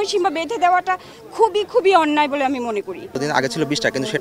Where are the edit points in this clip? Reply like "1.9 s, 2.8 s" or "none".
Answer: 3.2 s